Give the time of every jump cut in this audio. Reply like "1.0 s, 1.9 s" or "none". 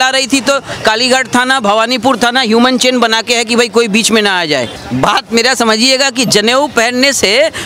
4.8 s